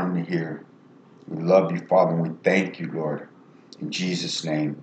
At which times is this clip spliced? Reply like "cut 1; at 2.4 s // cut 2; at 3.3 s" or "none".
none